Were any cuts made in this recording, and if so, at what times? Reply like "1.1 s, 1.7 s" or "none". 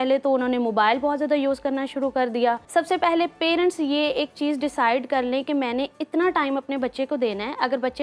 2.6 s